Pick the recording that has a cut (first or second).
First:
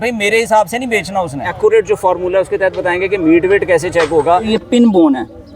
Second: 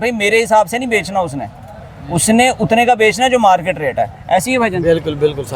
first